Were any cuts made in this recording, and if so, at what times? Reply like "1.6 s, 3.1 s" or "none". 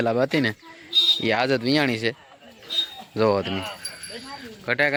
none